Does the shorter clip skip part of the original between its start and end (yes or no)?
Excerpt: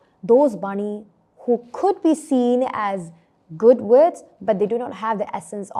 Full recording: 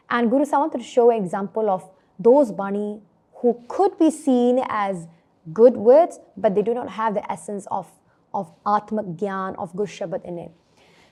no